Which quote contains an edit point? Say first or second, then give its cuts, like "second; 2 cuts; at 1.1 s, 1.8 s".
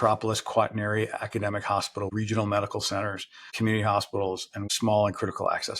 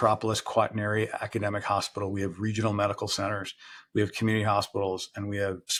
first; 3 cuts; at 2.1 s, 3.5 s, 4.6 s